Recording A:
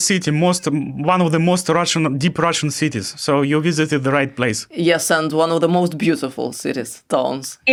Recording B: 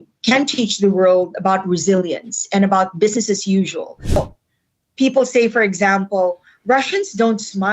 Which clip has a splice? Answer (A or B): B